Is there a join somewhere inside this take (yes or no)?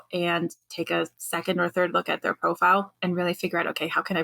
yes